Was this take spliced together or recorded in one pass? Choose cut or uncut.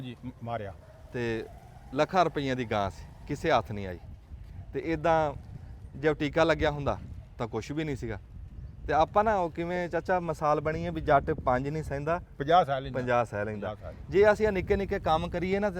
uncut